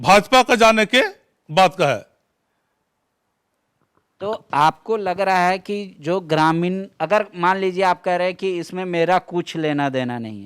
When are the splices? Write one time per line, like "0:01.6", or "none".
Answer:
none